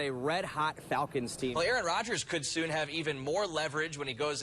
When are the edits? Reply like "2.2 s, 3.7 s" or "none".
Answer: 1.5 s

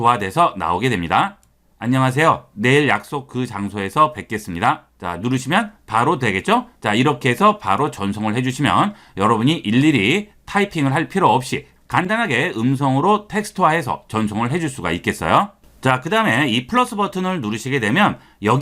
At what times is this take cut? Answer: 15.6 s

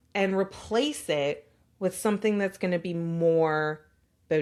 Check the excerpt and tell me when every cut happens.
none

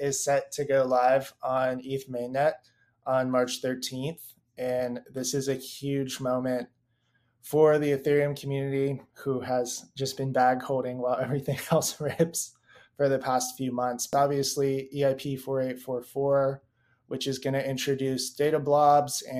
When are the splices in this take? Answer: 14.1 s

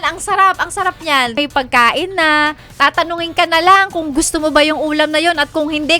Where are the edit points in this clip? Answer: 1.3 s

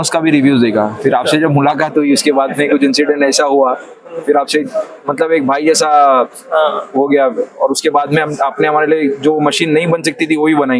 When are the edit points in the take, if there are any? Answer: none

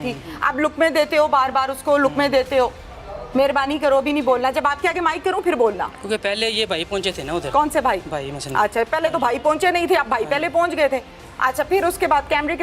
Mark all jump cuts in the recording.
none

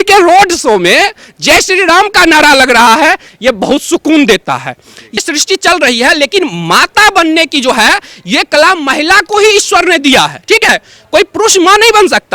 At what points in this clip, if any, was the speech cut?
5.2 s

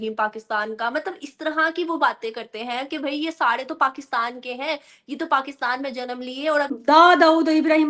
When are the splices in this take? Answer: 6.8 s

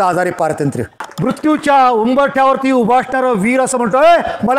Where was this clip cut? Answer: 1.1 s

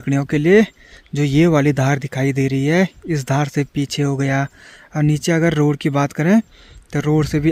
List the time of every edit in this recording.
none

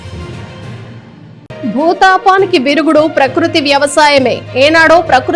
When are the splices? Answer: 1.0 s

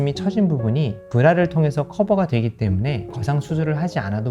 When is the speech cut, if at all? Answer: 3.1 s

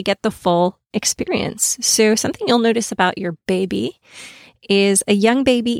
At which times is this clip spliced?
none

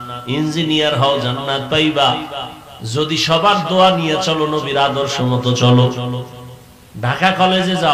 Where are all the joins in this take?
none

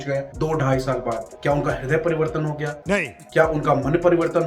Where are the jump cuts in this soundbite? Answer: 1.3 s

